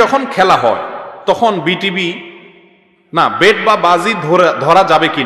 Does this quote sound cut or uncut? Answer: uncut